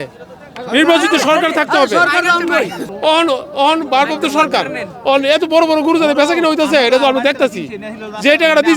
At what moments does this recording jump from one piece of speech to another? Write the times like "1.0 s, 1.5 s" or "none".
2.8 s